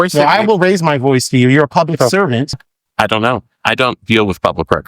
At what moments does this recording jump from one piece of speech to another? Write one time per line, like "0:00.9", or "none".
0:02.5